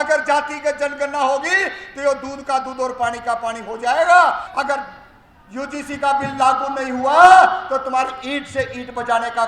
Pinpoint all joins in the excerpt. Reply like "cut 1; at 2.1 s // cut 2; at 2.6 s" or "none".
cut 1; at 4.5 s